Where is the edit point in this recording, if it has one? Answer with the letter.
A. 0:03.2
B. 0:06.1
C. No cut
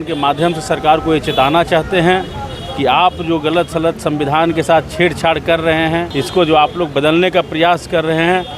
B